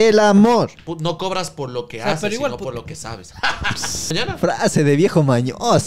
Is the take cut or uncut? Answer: cut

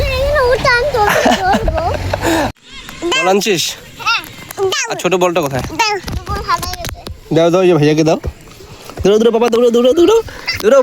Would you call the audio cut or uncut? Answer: cut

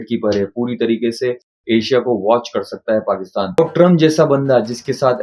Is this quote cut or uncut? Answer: cut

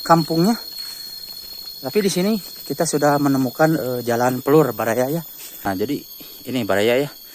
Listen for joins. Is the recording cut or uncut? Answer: cut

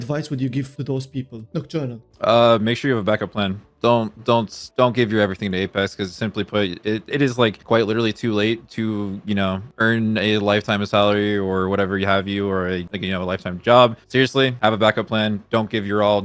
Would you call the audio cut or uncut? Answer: uncut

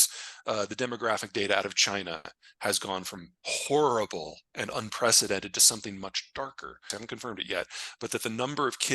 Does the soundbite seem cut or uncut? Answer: cut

